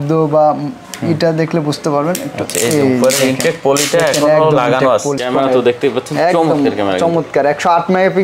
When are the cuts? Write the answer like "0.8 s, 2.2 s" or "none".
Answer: 5.2 s